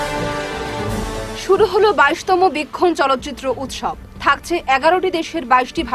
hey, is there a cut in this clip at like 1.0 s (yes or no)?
yes